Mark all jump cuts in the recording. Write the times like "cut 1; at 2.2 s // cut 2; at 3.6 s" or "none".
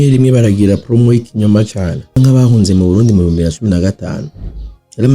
cut 1; at 2.2 s